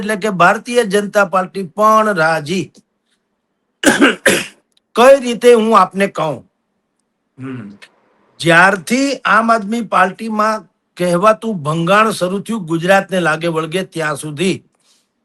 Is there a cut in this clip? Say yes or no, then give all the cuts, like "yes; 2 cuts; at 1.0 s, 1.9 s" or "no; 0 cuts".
no; 0 cuts